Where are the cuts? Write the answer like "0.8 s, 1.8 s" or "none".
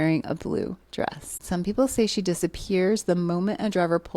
1.3 s